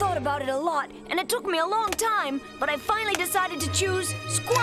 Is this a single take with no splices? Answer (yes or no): yes